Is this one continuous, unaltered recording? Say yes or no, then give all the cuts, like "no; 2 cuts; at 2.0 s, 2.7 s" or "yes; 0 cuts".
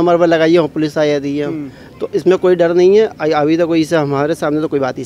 yes; 0 cuts